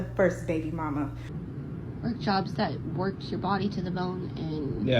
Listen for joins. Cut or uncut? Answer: cut